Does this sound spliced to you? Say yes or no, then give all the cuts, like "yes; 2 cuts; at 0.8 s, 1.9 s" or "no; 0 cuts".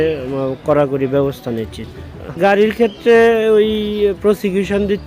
yes; 1 cut; at 2.3 s